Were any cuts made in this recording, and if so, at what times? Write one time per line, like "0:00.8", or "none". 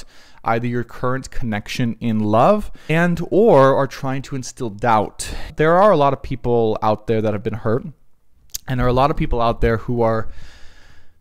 0:02.8
0:05.4